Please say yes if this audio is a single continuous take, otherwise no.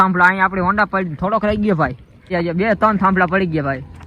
no